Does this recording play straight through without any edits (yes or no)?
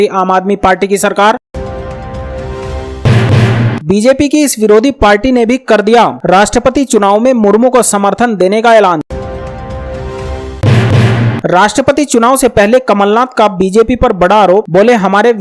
no